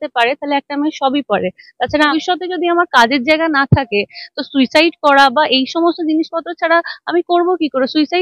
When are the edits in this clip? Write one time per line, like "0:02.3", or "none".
0:02.1